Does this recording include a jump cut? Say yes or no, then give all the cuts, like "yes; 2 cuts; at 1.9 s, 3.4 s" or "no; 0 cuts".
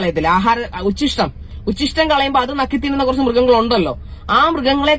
no; 0 cuts